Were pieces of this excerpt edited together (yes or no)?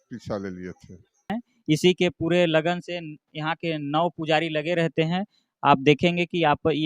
yes